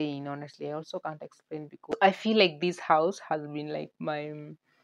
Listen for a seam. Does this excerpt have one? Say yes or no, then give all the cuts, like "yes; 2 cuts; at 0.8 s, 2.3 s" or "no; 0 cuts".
yes; 1 cut; at 1.7 s